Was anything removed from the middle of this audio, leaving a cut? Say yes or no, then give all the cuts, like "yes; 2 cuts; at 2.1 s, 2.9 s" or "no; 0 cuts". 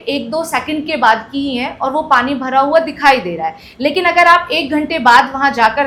no; 0 cuts